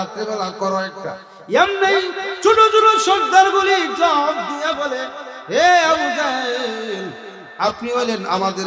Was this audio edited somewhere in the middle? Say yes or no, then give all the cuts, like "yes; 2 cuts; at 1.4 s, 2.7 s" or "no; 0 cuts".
yes; 1 cut; at 1.3 s